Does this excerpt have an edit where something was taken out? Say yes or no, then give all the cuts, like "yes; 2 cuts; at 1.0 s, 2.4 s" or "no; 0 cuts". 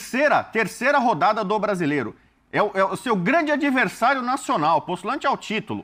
no; 0 cuts